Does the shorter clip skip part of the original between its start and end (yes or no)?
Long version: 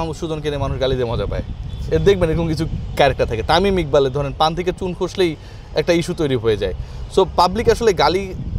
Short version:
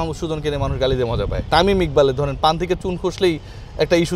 yes